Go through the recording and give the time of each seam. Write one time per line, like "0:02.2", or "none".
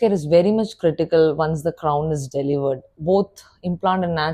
0:02.9